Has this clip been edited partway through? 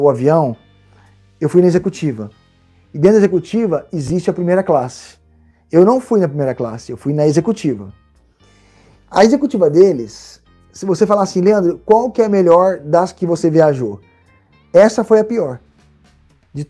no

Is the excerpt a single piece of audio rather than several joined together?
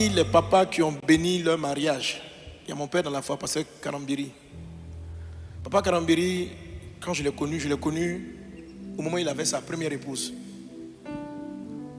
yes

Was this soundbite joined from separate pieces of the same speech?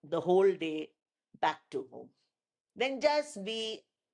no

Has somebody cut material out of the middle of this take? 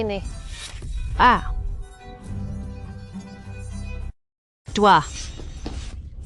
no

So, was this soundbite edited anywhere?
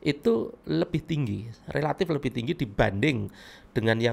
no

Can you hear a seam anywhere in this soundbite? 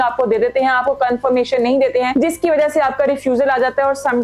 no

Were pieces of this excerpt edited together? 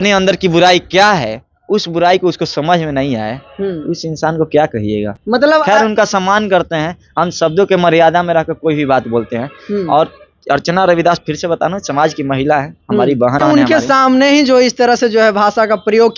no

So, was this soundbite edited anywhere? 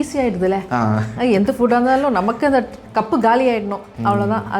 yes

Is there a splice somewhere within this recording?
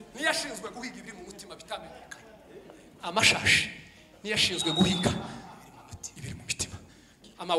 no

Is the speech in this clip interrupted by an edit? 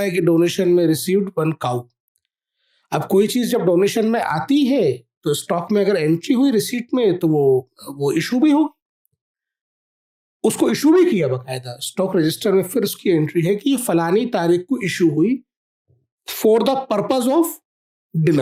no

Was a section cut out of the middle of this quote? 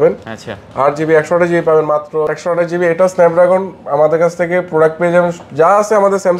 yes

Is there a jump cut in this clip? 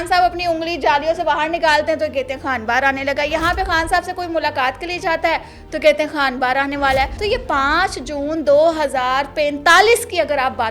yes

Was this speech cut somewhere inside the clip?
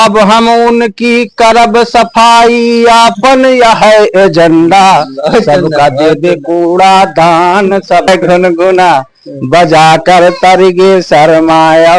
yes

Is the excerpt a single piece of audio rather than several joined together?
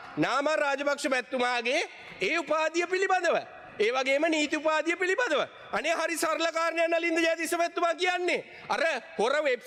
yes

